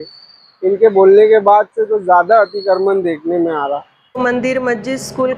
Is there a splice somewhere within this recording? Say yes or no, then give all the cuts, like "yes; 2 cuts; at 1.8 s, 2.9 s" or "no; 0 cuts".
yes; 1 cut; at 4.2 s